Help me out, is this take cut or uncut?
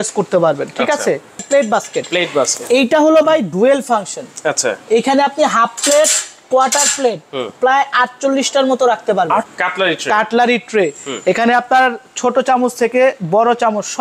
cut